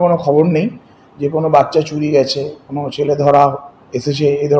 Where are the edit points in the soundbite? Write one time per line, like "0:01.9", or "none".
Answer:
none

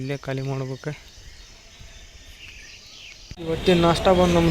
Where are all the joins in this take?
0:03.3

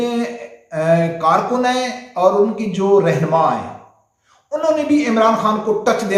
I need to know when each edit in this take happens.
none

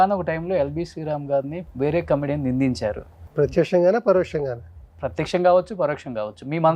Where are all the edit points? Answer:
0:01.6
0:03.2

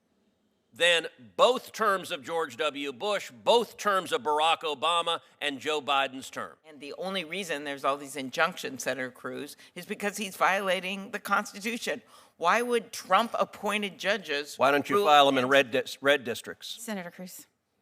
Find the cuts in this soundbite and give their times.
0:06.8

